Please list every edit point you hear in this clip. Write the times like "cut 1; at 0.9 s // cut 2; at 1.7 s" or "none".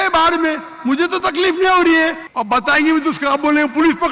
cut 1; at 2.2 s